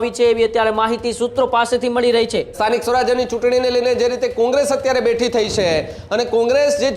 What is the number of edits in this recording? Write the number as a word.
one